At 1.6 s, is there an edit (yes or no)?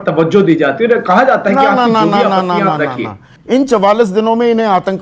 no